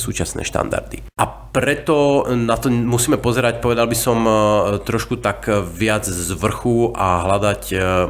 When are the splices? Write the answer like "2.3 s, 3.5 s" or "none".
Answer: 1.0 s